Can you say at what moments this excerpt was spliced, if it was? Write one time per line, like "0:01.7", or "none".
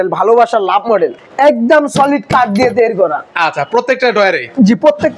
0:01.2